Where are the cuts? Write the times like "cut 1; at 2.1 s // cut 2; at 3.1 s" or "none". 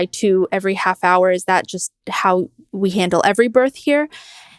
none